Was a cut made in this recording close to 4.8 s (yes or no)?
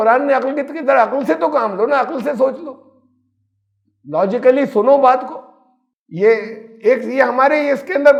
no